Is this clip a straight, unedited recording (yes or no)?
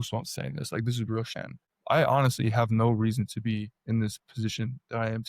no